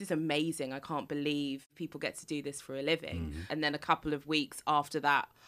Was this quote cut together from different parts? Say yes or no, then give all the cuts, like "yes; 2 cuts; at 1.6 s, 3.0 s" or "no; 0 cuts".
yes; 2 cuts; at 1.7 s, 3.5 s